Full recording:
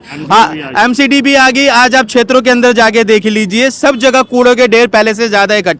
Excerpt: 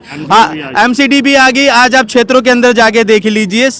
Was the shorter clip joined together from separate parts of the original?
no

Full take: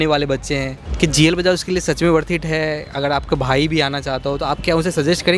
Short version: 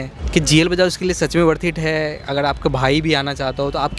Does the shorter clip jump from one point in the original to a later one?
no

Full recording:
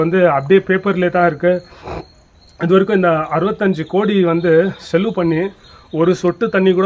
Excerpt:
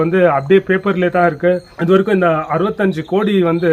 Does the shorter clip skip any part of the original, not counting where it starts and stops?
yes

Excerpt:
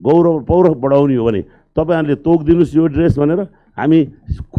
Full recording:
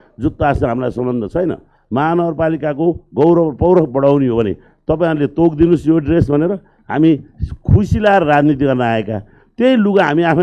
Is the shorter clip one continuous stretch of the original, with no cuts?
yes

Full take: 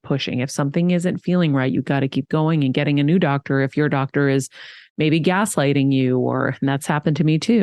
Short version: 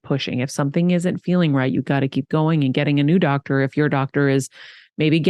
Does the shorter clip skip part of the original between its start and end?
no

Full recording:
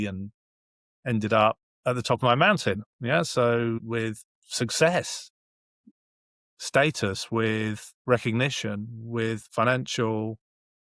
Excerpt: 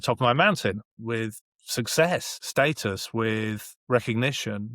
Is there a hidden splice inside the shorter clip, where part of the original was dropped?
yes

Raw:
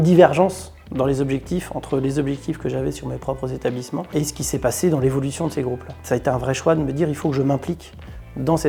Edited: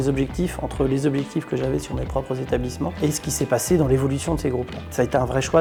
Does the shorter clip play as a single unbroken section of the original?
yes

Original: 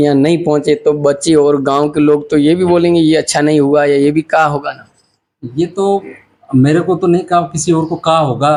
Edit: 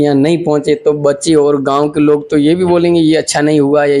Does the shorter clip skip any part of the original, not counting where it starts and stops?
no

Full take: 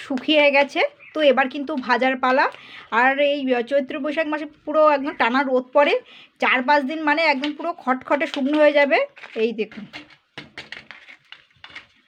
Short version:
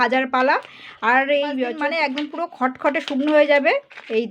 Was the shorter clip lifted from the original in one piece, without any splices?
no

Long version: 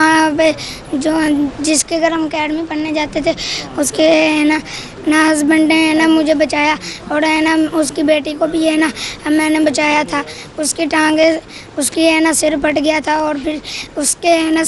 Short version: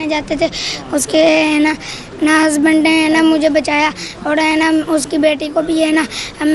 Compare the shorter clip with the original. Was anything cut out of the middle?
no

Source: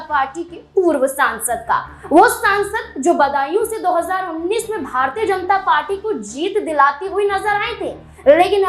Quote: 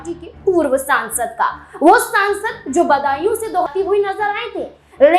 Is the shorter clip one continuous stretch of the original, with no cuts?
no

